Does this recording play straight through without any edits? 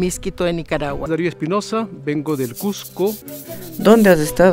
no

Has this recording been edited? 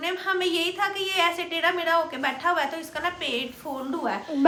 no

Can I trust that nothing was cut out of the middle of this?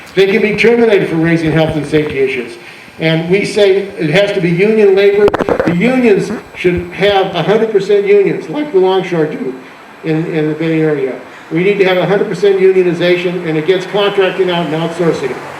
yes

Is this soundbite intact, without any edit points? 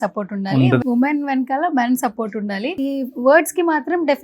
no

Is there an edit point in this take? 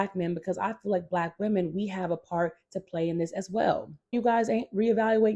yes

